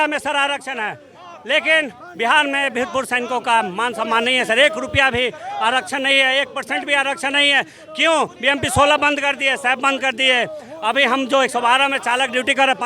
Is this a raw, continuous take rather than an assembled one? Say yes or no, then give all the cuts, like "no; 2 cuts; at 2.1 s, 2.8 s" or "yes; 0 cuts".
yes; 0 cuts